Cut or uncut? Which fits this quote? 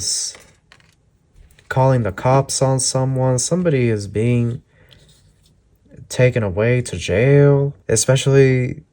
cut